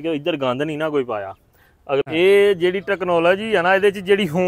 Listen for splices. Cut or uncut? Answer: cut